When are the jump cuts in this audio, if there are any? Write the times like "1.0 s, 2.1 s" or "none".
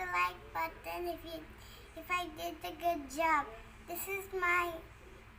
none